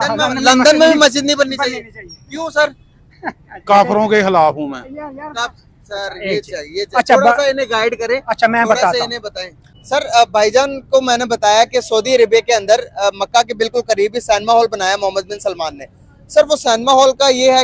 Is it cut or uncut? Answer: cut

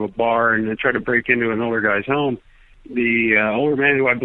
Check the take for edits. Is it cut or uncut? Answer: uncut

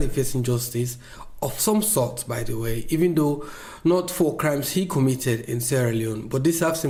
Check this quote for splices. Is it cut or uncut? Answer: uncut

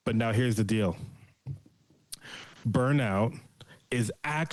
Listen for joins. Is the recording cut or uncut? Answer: uncut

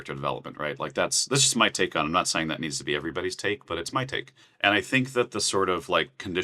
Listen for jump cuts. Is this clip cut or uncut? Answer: cut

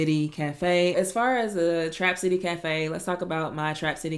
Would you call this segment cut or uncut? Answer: cut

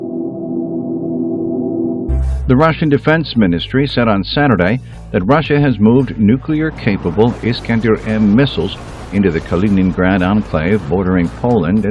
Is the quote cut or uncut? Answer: cut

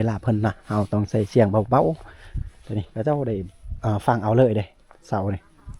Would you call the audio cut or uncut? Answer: uncut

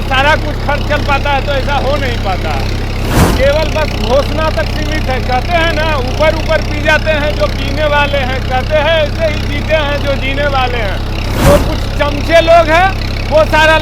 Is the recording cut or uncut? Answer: cut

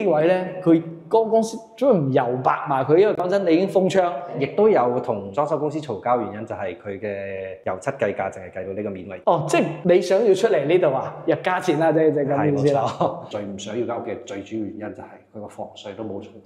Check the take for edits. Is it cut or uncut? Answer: cut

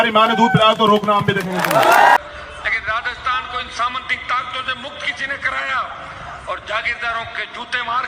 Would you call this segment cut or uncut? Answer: cut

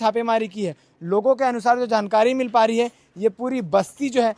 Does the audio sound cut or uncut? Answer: uncut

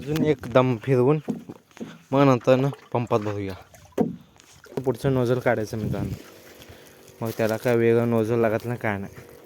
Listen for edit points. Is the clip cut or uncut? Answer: cut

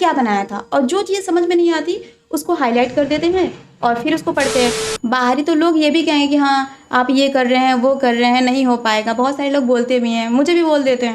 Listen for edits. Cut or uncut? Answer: cut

